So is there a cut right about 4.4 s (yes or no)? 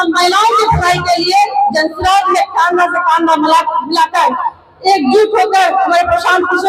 no